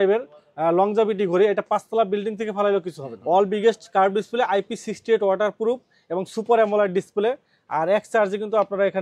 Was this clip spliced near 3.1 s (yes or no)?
yes